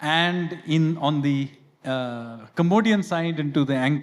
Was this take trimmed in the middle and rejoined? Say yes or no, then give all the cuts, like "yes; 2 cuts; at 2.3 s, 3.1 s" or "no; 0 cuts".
no; 0 cuts